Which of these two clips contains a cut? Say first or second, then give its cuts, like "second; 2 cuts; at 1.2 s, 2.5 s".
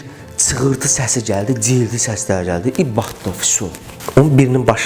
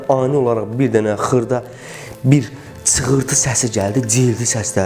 first; 1 cut; at 3.9 s